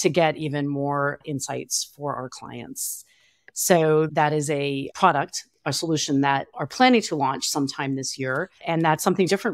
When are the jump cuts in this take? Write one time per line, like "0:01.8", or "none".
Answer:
0:06.5
0:08.5